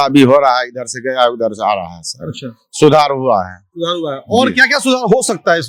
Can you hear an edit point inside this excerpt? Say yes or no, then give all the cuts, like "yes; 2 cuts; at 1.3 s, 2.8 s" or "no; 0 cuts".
no; 0 cuts